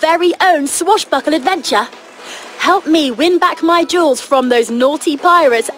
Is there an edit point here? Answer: no; 0 cuts

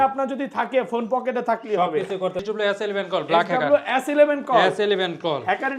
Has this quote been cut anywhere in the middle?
yes; 1 cut; at 2.4 s

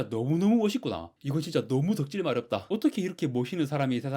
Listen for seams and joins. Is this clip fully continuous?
no; 1 cut; at 2.6 s

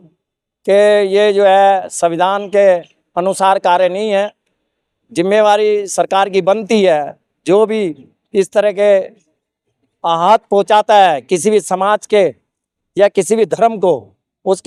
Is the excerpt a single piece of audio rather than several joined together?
yes; 0 cuts

